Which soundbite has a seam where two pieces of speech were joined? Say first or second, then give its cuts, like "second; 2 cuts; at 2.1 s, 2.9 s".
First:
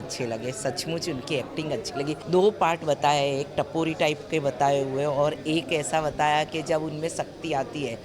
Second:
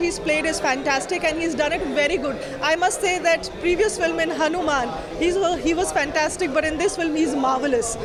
first; 1 cut; at 2.2 s